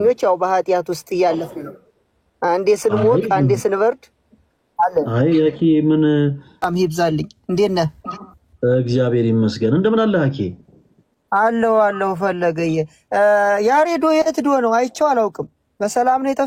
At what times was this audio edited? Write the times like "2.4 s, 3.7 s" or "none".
6.7 s